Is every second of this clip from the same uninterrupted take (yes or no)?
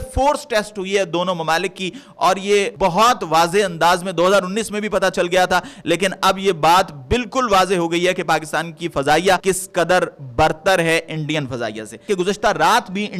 no